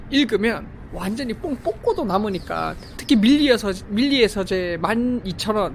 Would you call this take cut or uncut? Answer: uncut